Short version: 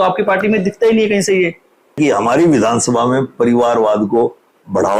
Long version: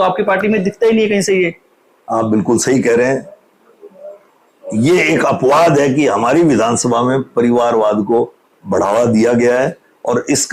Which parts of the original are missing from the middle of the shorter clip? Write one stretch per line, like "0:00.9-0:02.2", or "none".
0:02.0-0:05.9